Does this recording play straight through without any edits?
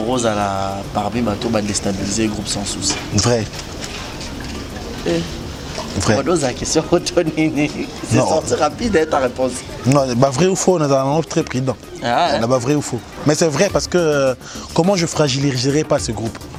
yes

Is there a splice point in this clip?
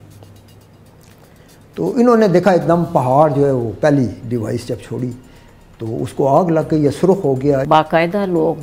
yes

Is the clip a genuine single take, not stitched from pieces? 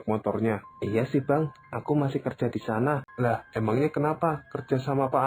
no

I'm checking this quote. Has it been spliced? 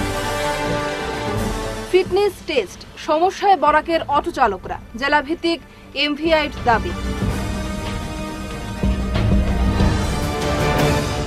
yes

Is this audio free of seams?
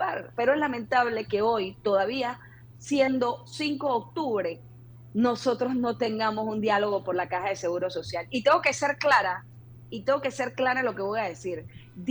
yes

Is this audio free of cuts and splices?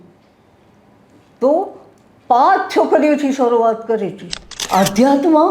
no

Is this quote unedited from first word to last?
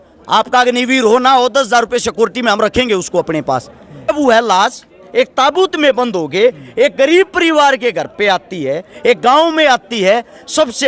no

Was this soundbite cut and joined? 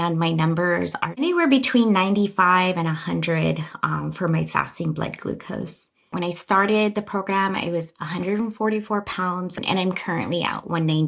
yes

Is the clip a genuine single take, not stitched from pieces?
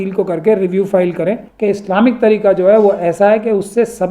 no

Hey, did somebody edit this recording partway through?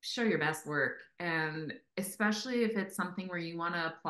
no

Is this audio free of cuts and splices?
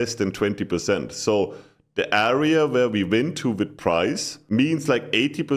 no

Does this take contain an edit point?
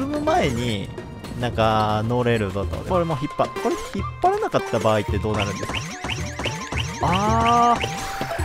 yes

